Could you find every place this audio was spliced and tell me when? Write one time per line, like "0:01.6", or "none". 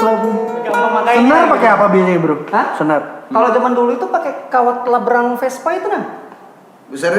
0:00.9